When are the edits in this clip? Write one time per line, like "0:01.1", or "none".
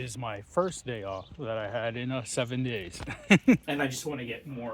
0:03.6

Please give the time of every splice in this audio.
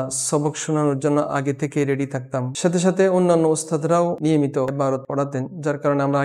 0:04.9

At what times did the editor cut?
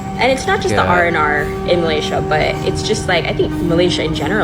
none

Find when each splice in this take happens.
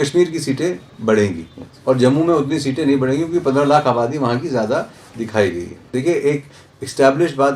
0:05.9

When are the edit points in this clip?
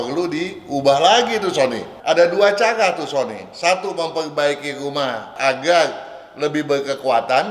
0:01.9
0:05.3

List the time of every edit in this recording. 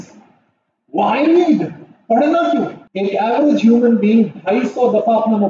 0:02.8

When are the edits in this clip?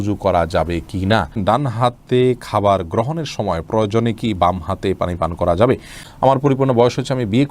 0:01.3
0:06.0

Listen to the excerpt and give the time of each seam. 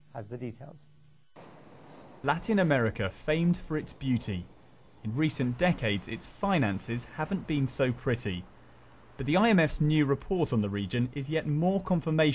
0:05.5

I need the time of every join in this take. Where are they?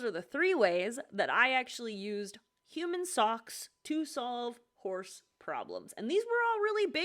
none

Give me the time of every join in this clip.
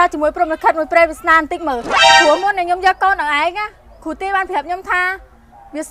none

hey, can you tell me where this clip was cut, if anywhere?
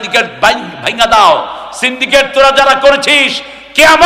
none

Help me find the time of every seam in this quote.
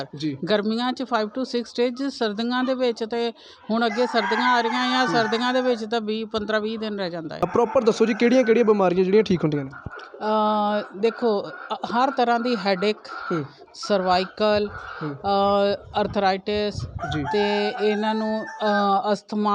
0:07.5

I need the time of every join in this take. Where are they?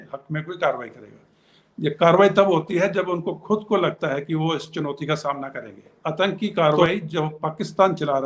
0:05.9

